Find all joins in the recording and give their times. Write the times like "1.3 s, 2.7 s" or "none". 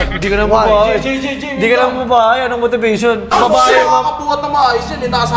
none